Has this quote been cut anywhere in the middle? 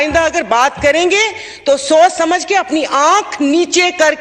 no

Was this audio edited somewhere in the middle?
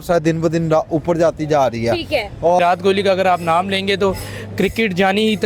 yes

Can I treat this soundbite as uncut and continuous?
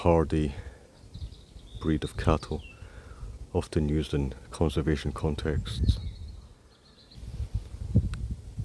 yes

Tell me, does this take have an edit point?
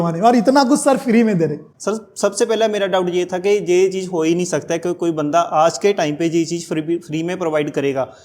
yes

